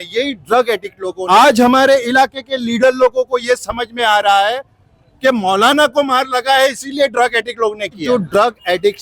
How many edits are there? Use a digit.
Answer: 2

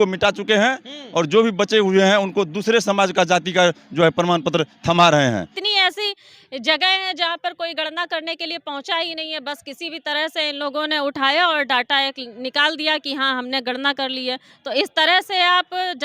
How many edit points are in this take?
1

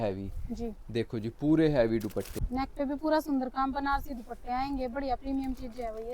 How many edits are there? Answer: 1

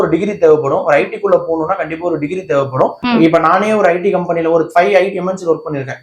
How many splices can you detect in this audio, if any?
1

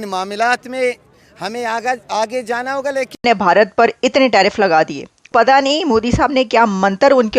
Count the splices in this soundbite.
1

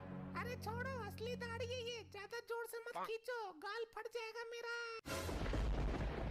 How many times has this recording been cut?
1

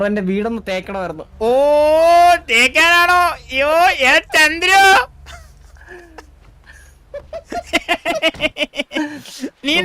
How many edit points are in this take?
0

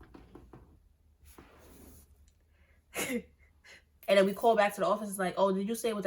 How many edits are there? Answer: 1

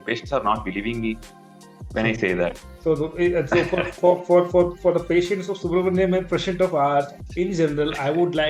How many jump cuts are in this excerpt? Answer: 1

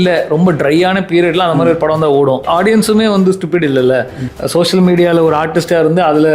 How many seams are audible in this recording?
2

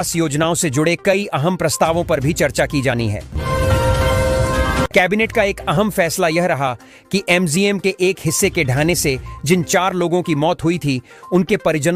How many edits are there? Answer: 2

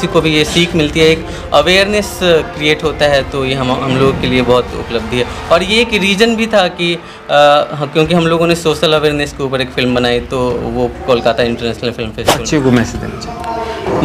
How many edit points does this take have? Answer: 1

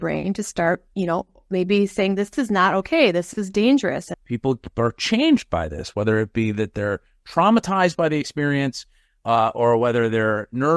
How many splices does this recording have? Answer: 1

